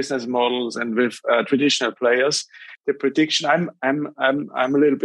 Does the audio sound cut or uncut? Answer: cut